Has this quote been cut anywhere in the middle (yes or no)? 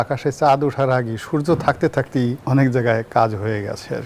yes